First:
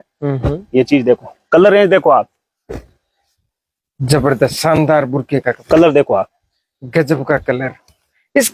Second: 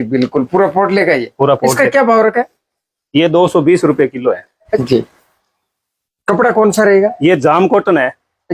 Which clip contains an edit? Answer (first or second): second